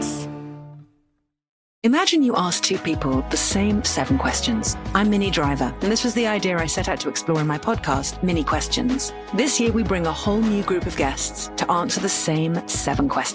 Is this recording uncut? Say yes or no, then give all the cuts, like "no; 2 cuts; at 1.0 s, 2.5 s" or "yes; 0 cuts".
no; 1 cut; at 1.6 s